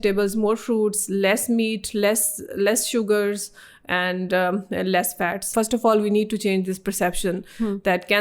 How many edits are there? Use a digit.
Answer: 1